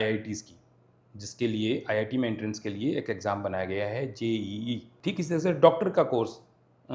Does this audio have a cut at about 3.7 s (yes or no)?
no